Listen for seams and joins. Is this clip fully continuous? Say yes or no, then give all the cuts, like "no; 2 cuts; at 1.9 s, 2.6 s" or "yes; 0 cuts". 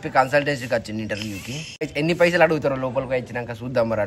no; 1 cut; at 1.8 s